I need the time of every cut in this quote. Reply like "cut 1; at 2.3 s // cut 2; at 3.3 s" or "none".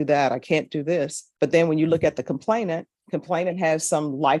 cut 1; at 1.2 s // cut 2; at 2.9 s